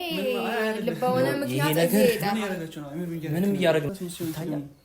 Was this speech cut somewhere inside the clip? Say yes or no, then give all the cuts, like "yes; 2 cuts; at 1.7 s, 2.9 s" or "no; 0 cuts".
yes; 1 cut; at 3.9 s